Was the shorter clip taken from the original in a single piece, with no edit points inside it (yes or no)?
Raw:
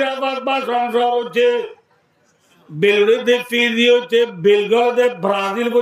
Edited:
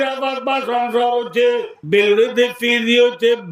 no